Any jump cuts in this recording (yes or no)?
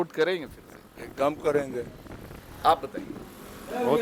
no